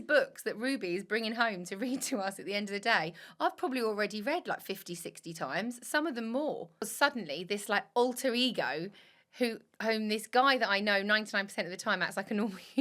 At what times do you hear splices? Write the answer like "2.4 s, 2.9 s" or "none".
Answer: 6.8 s